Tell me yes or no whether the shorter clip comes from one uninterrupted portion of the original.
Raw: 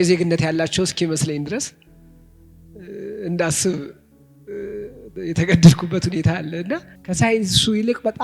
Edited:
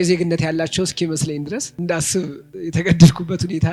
no